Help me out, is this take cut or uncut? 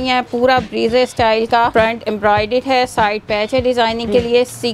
cut